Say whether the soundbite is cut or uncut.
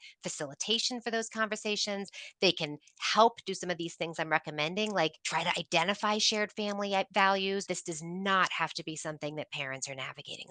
cut